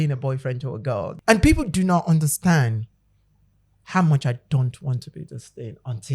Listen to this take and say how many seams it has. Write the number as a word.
one